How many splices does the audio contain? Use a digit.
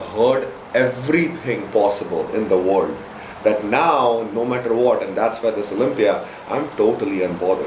0